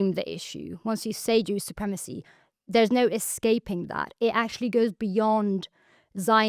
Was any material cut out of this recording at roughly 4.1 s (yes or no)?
no